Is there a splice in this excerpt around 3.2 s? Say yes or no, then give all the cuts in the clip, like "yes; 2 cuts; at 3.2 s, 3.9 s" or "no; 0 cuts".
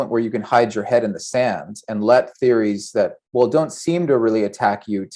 yes; 1 cut; at 3.2 s